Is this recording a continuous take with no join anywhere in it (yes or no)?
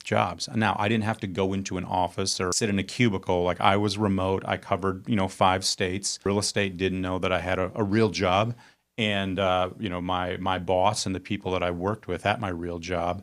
no